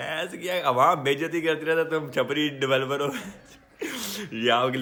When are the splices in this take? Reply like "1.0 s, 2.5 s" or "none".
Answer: none